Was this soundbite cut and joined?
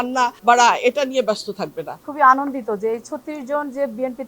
yes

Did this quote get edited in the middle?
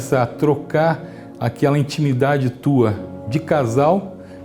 no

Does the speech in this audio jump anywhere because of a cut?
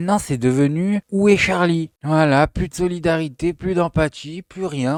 no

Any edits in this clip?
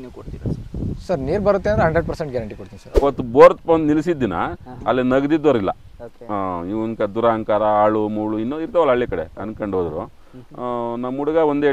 yes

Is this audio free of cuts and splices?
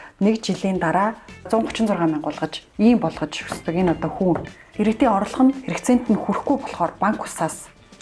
no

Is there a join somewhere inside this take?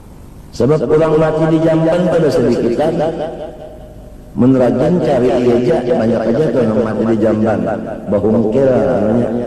no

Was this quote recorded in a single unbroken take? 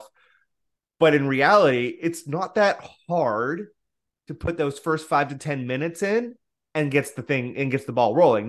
yes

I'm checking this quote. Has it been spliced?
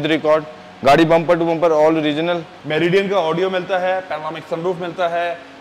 yes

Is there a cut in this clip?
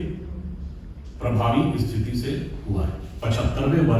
yes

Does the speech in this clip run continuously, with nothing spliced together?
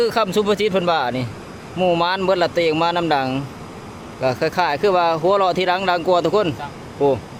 yes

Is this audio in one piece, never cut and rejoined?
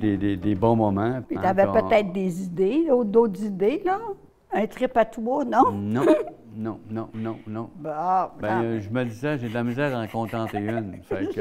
no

